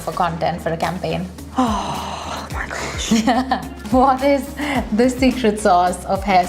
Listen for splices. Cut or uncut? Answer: cut